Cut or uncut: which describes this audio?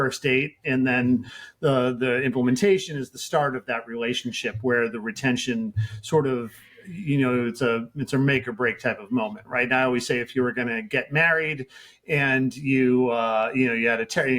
uncut